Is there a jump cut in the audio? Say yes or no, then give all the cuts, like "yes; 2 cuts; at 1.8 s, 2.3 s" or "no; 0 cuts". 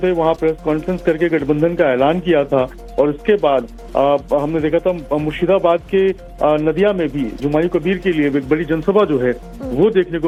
no; 0 cuts